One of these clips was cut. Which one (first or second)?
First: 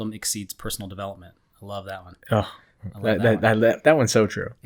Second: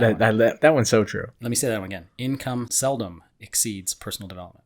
second